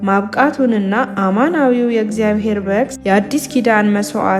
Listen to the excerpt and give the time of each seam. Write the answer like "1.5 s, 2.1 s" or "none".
2.9 s